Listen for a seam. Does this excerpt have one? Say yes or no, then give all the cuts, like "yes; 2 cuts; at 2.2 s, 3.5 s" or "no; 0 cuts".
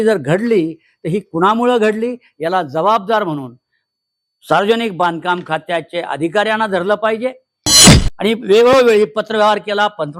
yes; 1 cut; at 7.7 s